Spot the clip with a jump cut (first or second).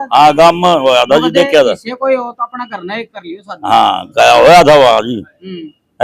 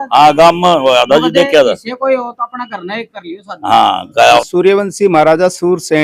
second